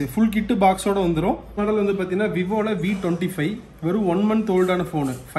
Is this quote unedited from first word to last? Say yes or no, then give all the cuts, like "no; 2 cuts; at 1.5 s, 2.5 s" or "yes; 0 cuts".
no; 1 cut; at 1.6 s